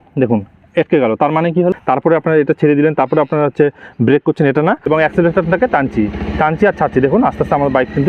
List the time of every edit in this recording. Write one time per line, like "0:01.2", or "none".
0:01.7
0:04.9